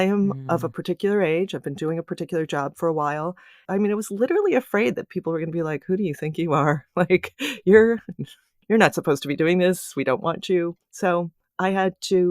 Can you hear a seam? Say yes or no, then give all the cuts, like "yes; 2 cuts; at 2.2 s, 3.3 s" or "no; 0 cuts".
yes; 2 cuts; at 3.6 s, 11.1 s